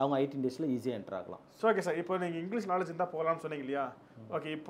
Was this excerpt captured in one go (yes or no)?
no